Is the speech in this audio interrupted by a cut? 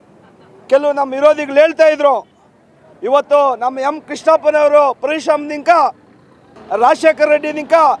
yes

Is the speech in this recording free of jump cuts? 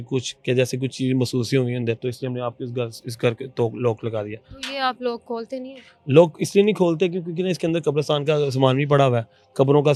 yes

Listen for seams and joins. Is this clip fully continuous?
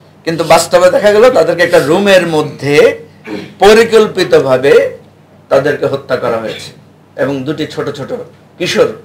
yes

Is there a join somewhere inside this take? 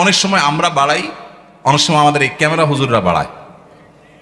no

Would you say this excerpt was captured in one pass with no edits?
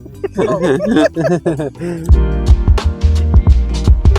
no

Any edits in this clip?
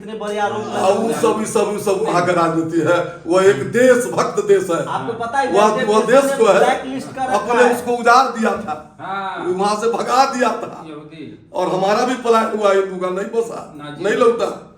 no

